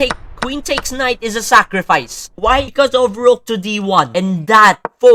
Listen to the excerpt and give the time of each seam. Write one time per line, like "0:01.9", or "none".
none